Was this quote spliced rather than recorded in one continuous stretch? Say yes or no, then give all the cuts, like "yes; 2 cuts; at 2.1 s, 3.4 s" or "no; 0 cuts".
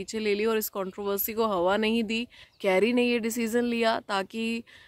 yes; 1 cut; at 2.4 s